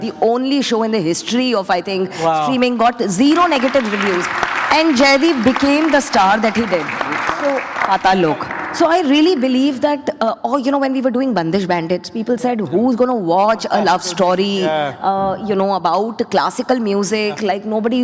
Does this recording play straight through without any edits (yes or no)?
yes